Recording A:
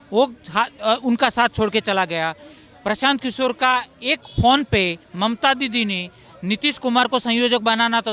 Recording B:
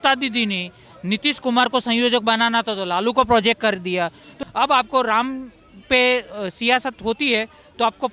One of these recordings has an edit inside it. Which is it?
B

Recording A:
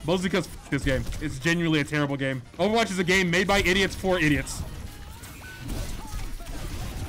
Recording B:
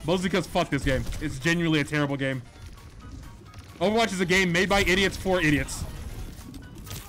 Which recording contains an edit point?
A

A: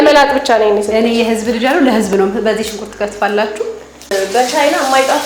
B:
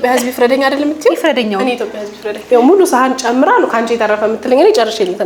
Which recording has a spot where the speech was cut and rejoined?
A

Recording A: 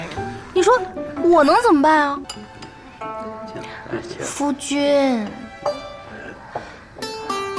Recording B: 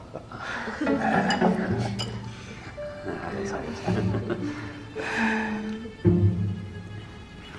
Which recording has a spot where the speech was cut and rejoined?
A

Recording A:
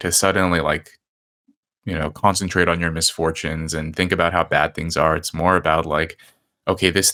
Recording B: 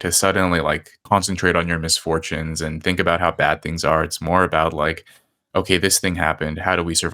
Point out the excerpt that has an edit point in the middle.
B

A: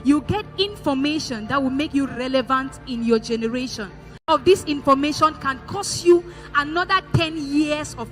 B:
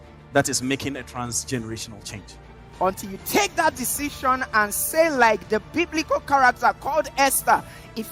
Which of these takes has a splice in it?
A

